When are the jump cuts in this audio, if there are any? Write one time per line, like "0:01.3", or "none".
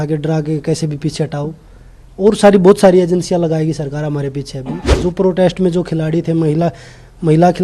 0:04.9